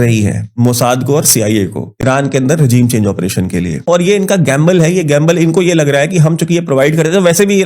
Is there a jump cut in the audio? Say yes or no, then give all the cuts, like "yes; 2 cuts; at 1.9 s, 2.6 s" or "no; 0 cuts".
yes; 1 cut; at 3.9 s